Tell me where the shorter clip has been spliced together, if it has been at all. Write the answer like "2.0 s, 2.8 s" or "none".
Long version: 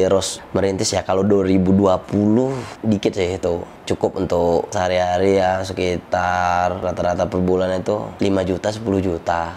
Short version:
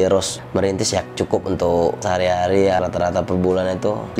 1.0 s, 2.8 s